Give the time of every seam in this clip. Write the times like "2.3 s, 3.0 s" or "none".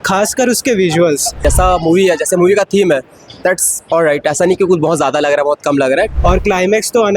1.4 s, 6.1 s